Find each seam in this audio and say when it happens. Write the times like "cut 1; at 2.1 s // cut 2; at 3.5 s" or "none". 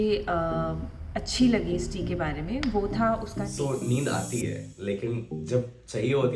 cut 1; at 3.5 s